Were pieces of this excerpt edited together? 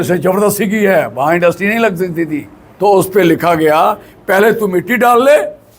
yes; 1 cut; at 2.6 s

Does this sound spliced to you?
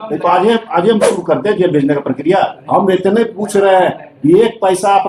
yes; 1 cut; at 2.6 s

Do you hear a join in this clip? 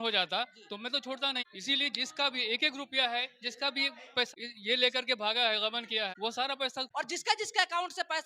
yes; 1 cut; at 6.8 s

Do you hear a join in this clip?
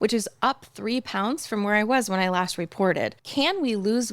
yes; 1 cut; at 3.2 s

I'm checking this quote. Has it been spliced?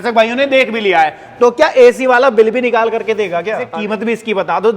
yes; 1 cut; at 3.7 s

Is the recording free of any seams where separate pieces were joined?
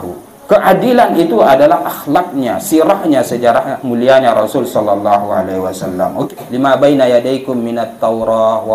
no; 1 cut; at 6.3 s

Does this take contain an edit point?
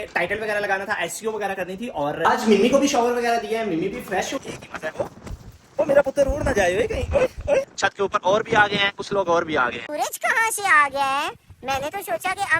yes; 4 cuts; at 2.2 s, 4.3 s, 7.7 s, 9.8 s

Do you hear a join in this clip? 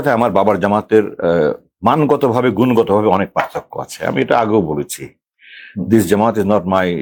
no; 0 cuts

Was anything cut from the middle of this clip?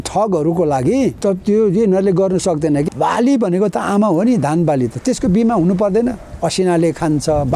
yes; 2 cuts; at 1.2 s, 2.9 s

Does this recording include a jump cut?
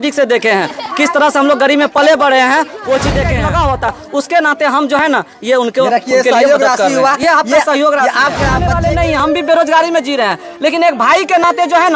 yes; 2 cuts; at 3.3 s, 8.6 s

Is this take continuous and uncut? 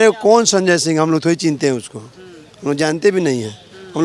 yes; 0 cuts

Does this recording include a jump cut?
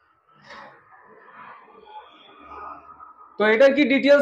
no; 0 cuts

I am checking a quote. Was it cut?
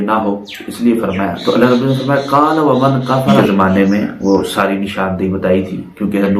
yes; 1 cut; at 3.3 s

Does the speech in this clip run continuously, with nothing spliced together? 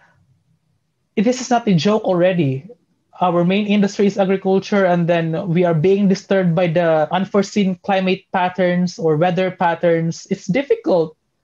no; 2 cuts; at 3.1 s, 7.1 s

